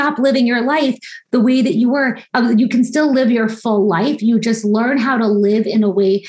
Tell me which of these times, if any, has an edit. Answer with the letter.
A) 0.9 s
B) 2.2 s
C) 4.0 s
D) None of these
B